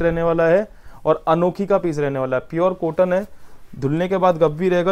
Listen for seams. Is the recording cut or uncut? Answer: uncut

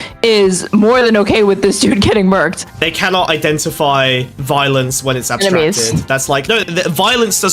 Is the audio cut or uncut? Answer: cut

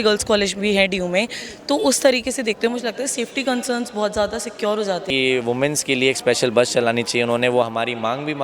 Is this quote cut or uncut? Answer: cut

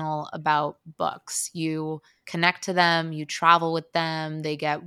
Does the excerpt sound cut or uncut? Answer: uncut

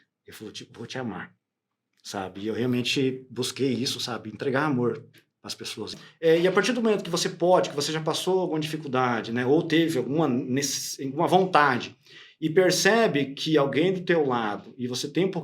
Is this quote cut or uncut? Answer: cut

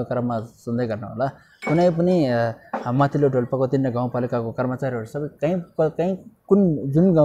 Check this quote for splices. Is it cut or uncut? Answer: uncut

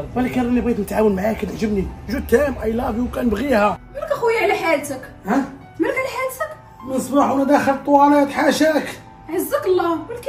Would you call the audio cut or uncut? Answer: cut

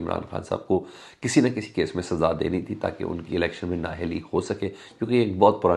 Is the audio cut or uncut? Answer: uncut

